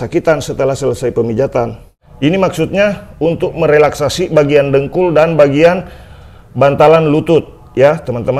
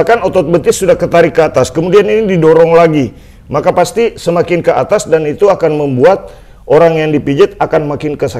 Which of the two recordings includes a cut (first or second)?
first